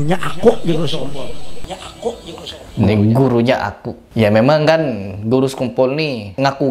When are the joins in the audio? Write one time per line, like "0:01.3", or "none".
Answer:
none